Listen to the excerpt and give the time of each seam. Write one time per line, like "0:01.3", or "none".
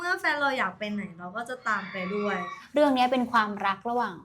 0:02.6